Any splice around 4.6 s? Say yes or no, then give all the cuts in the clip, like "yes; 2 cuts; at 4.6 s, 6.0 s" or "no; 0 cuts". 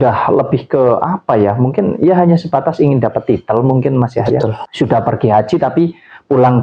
yes; 1 cut; at 4.6 s